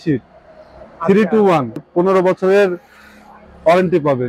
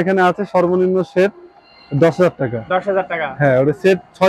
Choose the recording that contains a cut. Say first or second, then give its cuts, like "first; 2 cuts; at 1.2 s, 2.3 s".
first; 1 cut; at 1.9 s